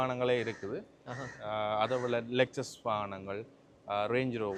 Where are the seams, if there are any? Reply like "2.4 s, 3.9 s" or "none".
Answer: none